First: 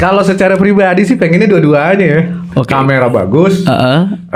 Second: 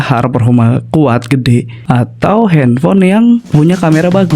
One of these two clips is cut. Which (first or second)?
second